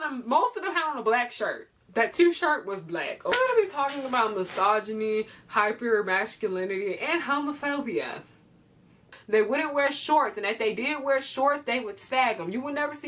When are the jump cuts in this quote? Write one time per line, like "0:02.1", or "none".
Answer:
0:03.3
0:09.1